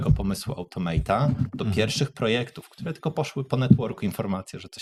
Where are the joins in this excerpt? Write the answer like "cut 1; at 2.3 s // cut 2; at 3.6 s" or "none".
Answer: none